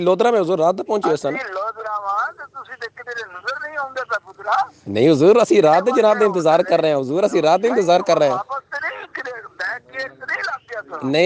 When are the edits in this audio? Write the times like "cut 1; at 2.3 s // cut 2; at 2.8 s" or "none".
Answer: none